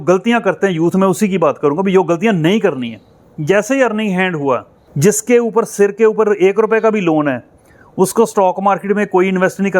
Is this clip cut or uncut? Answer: cut